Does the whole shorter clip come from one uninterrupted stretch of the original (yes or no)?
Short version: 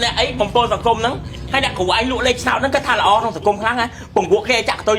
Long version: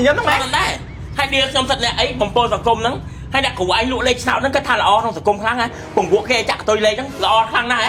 yes